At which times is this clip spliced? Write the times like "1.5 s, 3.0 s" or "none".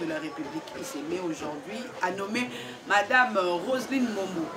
none